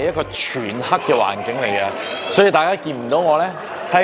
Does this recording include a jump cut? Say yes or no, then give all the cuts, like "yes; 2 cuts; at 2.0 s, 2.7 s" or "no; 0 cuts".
no; 0 cuts